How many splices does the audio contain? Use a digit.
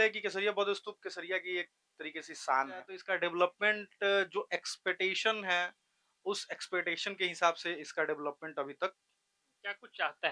1